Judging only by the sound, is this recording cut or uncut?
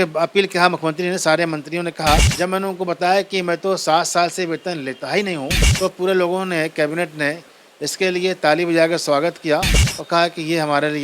cut